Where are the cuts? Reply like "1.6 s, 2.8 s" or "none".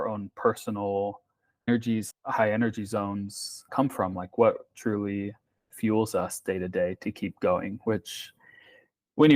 2.1 s, 3.7 s